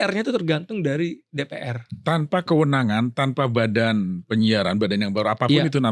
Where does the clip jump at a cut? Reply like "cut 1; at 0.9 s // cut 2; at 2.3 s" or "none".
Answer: none